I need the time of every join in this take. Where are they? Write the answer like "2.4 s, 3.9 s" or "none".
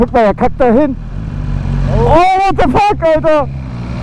none